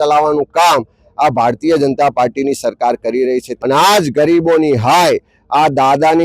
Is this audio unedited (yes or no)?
no